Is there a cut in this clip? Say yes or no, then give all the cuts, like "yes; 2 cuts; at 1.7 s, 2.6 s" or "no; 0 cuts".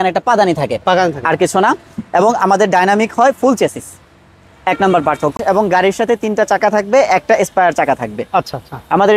yes; 1 cut; at 5.4 s